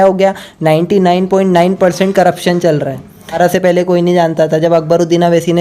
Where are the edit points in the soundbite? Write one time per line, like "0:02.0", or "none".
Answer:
0:03.4